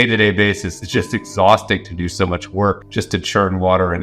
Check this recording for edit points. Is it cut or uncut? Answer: cut